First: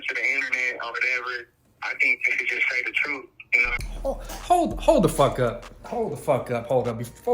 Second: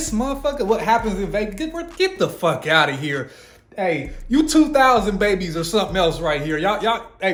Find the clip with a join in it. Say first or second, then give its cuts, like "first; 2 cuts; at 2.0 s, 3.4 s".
first; 2 cuts; at 2.2 s, 3.8 s